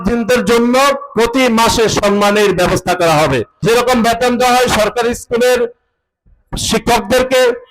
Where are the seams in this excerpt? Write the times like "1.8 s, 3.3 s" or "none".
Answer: 3.6 s